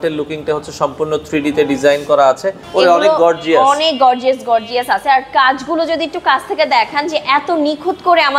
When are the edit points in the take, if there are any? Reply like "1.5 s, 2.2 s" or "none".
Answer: 2.6 s